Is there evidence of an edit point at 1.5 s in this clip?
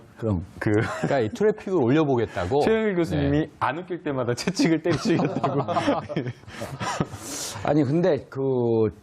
yes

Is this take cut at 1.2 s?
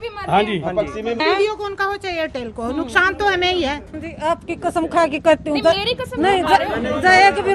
yes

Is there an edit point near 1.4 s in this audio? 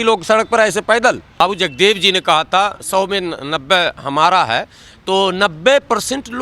yes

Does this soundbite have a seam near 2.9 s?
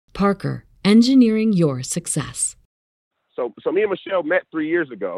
yes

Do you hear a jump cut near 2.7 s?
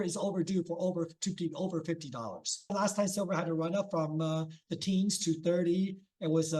yes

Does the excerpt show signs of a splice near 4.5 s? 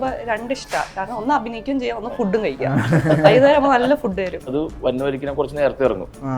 yes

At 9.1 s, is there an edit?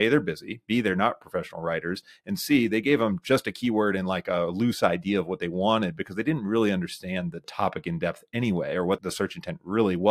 yes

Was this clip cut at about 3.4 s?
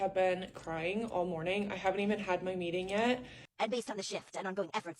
yes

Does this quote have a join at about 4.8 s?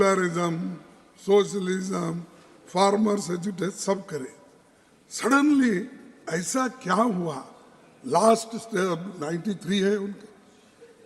no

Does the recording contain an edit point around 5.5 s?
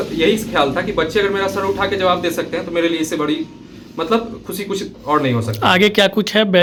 no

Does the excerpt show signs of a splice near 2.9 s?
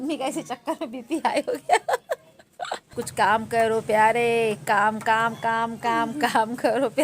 yes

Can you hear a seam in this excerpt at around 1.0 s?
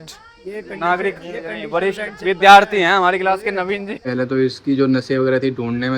no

